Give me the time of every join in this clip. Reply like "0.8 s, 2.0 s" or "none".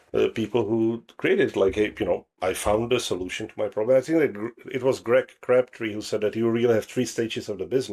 2.3 s